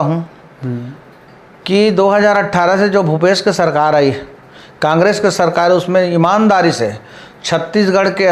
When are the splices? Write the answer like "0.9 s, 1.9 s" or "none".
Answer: none